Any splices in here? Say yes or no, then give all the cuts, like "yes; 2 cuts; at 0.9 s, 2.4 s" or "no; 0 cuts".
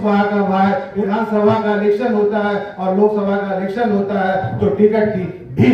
yes; 1 cut; at 0.9 s